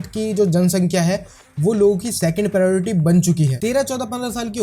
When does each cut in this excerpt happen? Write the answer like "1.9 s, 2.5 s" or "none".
3.5 s